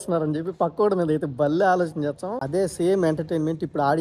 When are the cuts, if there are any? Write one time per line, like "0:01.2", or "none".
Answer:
0:02.3